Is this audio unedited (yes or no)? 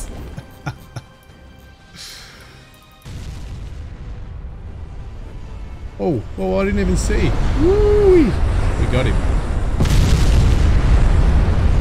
no